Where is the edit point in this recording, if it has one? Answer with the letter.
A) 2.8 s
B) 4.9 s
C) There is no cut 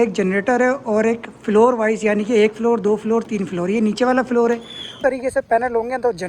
B